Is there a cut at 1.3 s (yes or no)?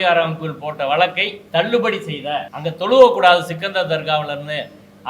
yes